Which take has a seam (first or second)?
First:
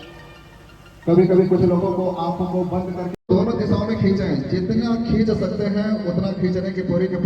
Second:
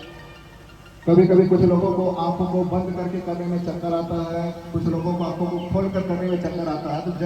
first